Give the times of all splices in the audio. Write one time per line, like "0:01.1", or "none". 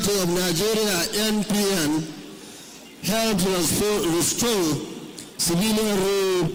none